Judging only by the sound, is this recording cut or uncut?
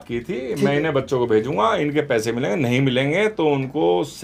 uncut